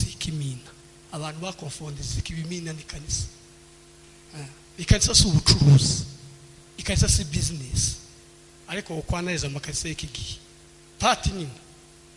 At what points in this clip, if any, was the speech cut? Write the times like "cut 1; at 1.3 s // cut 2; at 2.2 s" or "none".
none